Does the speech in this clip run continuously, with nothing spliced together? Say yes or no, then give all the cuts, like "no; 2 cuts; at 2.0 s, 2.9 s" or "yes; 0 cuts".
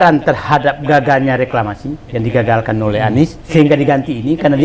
no; 1 cut; at 3.4 s